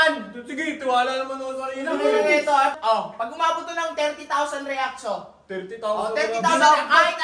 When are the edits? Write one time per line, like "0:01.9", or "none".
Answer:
0:02.8